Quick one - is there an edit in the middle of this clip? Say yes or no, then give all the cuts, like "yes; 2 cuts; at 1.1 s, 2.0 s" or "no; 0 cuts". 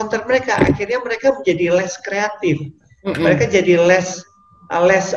no; 0 cuts